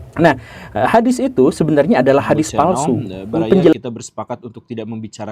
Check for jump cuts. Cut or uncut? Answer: cut